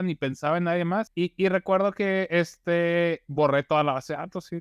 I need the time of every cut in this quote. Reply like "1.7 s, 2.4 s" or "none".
1.1 s